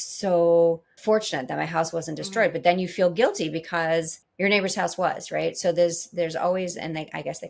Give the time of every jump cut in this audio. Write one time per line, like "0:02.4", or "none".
0:00.9
0:04.2